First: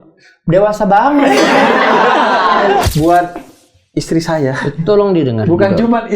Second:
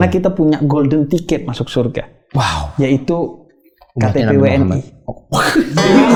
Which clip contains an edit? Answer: first; 1 cut; at 2.9 s

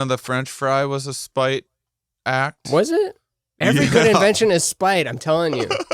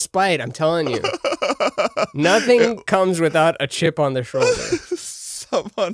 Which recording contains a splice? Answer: second; 1 cut; at 3.9 s

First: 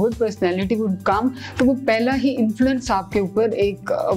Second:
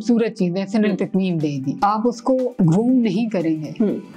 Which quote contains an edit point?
second; 1 cut; at 1.9 s

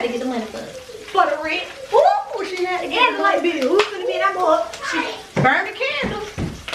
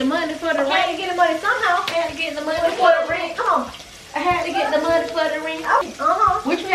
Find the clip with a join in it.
second; 1 cut; at 5.8 s

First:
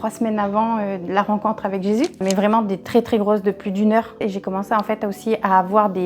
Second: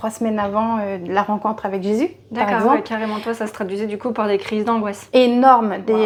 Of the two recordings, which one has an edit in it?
first; 2 cuts; at 2.2 s, 4.2 s

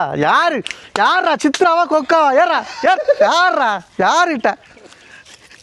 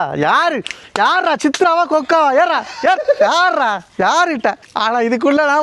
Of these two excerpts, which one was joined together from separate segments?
second; 1 cut; at 4.7 s

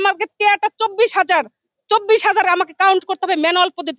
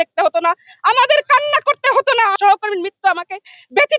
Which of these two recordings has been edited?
second; 1 cut; at 2.4 s

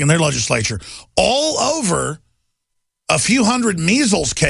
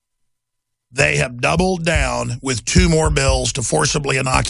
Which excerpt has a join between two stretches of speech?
second; 1 cut; at 2.1 s

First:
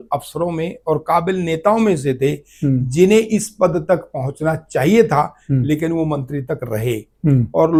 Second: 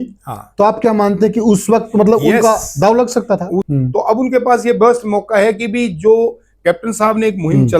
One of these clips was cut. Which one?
second; 1 cut; at 3.7 s

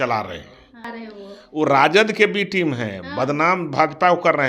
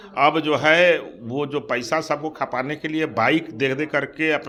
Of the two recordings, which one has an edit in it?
first; 1 cut; at 0.9 s

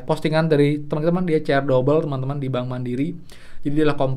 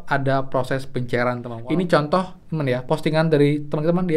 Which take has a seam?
second; 1 cut; at 1.5 s

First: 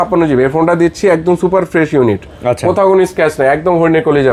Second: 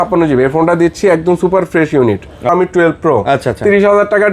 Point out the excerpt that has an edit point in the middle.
second; 1 cut; at 2.5 s

